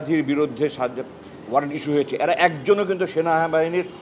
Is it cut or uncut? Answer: uncut